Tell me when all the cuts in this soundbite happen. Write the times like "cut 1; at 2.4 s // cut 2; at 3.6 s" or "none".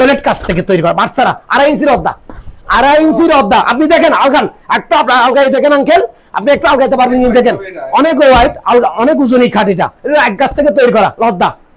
none